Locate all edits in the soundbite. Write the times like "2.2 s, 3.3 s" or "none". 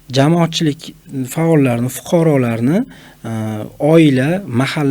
none